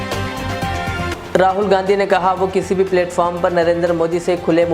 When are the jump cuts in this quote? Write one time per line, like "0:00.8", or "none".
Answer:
0:01.1